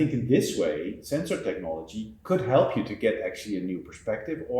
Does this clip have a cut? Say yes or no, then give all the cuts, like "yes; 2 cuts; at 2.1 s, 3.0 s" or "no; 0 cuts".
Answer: yes; 1 cut; at 2.1 s